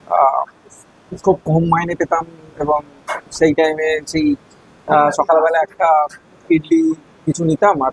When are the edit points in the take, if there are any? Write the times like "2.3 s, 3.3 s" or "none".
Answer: none